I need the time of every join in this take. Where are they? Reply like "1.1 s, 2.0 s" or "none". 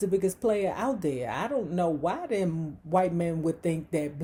none